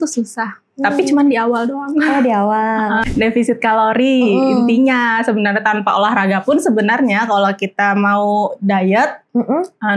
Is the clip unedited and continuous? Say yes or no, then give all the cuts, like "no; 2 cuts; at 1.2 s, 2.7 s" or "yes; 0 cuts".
no; 1 cut; at 3.1 s